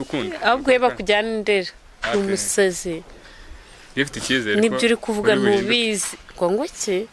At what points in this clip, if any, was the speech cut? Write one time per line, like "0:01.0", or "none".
none